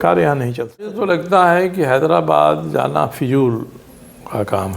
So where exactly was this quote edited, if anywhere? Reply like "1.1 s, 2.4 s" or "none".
1.2 s